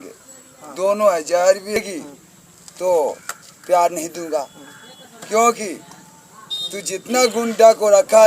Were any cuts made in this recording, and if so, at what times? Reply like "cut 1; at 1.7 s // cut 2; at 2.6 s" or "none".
cut 1; at 1.8 s